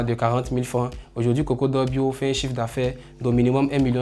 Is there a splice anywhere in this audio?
no; 0 cuts

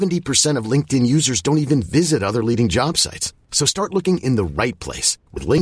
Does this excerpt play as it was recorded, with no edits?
yes; 0 cuts

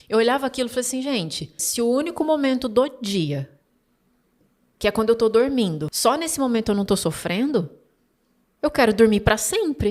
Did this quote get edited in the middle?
yes; 2 cuts; at 1.6 s, 5.9 s

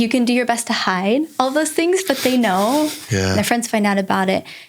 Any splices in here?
yes; 1 cut; at 3.1 s

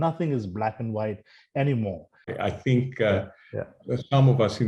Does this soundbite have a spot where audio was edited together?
yes; 1 cut; at 2.3 s

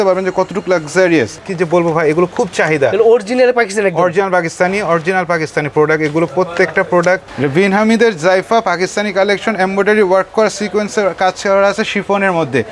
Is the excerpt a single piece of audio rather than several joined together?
no; 2 cuts; at 1.4 s, 7.3 s

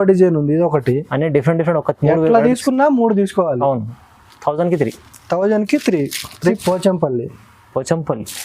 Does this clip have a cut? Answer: yes; 1 cut; at 6.6 s

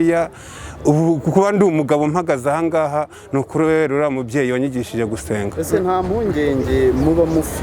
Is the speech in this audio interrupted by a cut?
no; 0 cuts

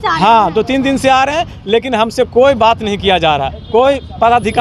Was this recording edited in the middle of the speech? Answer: no; 0 cuts

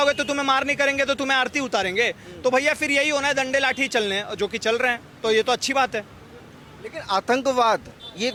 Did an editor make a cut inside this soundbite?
no; 0 cuts

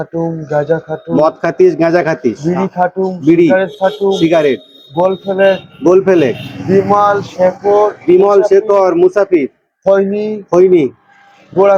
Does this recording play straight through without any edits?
yes; 0 cuts

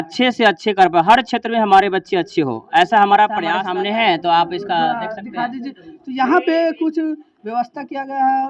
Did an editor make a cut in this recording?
yes; 1 cut; at 3.6 s

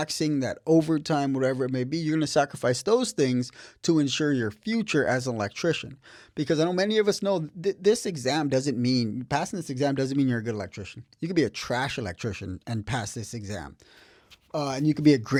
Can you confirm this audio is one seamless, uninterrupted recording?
yes; 0 cuts

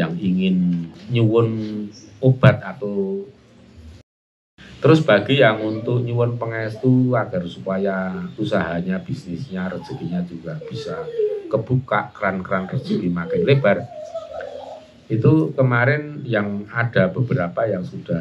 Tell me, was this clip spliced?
yes; 2 cuts; at 1.0 s, 4.4 s

